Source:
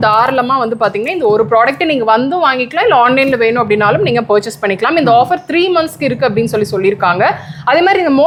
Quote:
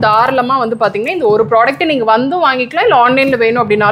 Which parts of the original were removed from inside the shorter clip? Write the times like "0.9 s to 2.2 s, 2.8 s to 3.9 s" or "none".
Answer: none